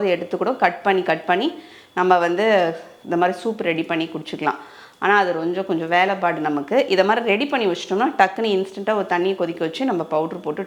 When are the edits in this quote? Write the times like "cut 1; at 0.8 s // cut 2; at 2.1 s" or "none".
none